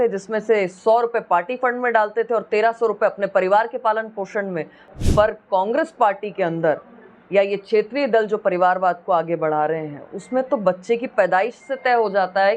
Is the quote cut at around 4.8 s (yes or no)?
yes